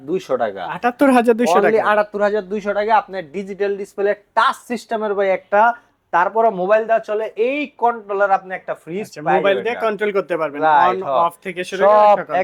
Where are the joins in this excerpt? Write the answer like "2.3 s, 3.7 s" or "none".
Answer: none